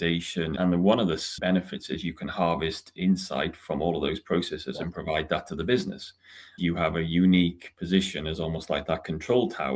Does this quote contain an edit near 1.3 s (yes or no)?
yes